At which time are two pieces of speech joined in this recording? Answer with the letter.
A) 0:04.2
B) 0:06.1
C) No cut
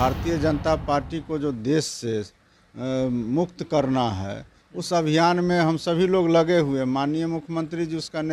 C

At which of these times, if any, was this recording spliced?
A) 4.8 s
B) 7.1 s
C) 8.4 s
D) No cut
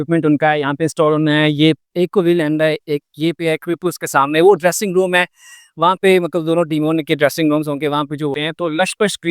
C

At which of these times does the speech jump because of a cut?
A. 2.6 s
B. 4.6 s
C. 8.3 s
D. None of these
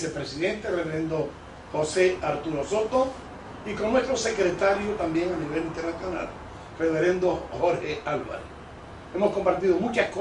C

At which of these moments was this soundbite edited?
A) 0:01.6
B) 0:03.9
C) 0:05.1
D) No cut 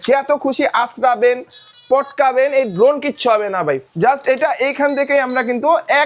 B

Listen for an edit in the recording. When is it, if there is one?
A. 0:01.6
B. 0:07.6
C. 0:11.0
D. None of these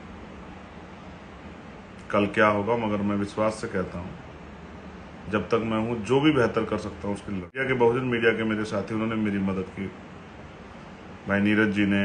B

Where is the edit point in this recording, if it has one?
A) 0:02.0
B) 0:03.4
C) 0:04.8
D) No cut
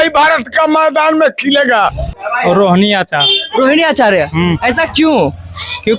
A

